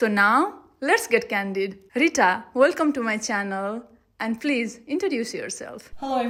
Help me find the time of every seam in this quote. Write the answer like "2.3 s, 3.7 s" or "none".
none